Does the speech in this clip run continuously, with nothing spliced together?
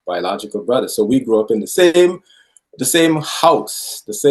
yes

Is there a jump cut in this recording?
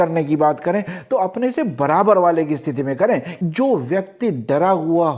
yes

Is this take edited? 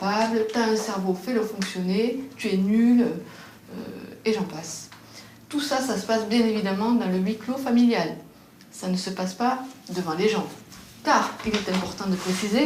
no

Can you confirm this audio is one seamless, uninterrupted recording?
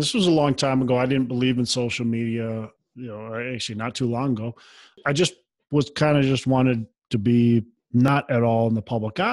no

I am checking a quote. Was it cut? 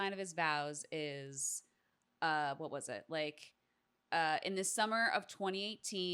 no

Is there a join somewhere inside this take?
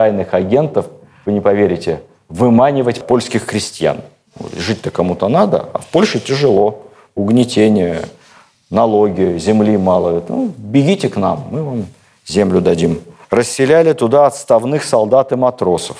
no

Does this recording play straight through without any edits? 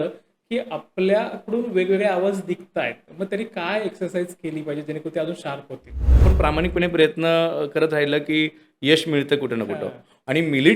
no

